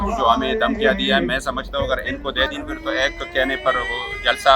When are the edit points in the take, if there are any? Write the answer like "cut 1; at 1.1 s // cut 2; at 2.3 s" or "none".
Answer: none